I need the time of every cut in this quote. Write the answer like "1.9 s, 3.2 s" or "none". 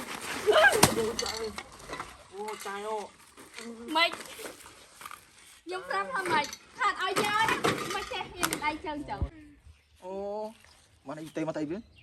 9.3 s

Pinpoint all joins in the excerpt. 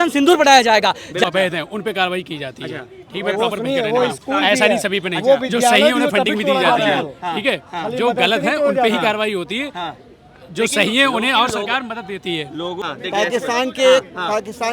1.2 s, 12.8 s

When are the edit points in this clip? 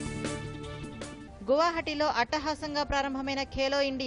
1.2 s

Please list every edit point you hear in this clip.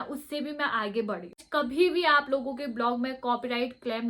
1.4 s

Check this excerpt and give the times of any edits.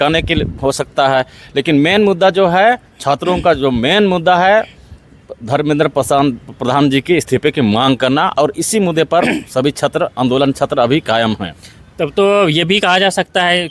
none

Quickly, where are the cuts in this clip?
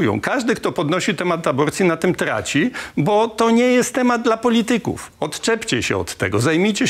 none

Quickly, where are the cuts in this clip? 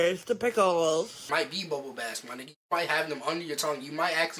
1.3 s

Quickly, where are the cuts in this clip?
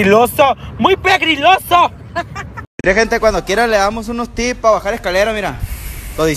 2.6 s

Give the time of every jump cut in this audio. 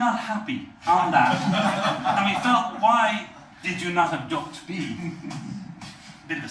3.9 s

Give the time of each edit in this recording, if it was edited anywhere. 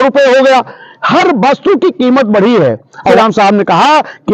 3.1 s

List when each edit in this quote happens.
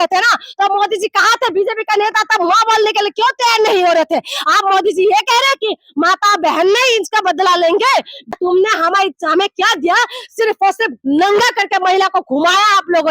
8.3 s

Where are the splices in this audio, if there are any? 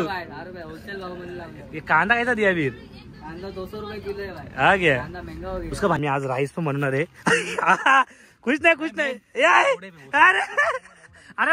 6.0 s

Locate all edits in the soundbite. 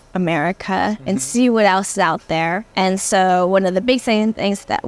none

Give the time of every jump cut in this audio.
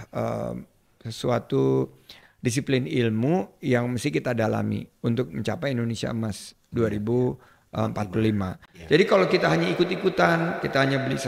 none

